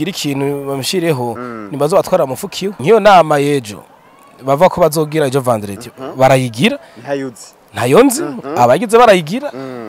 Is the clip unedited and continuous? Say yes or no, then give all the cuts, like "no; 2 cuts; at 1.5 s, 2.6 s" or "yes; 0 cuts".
no; 1 cut; at 2.7 s